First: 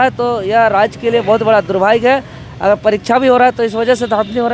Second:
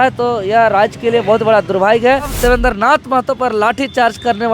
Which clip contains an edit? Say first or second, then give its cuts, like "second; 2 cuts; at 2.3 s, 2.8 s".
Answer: second; 1 cut; at 2.3 s